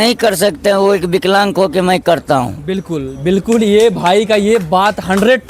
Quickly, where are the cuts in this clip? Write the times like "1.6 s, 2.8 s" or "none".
none